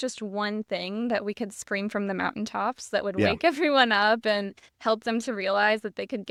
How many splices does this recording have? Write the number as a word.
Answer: zero